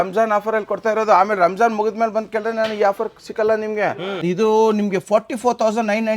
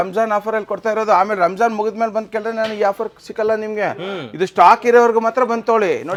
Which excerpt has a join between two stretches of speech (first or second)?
first